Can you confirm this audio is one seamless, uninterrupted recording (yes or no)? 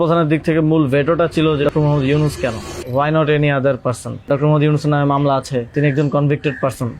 no